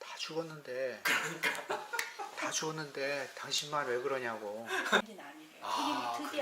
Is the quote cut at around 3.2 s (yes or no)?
no